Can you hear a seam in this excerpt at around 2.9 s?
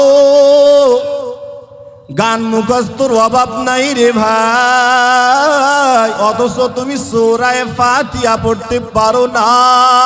no; 1 cut; at 6.2 s

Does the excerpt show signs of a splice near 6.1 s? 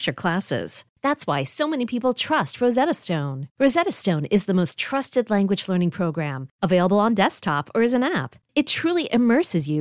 no; 0 cuts

